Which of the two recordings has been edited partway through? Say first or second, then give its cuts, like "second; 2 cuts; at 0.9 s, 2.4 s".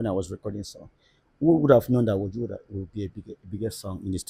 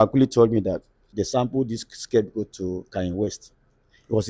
second; 1 cut; at 1.0 s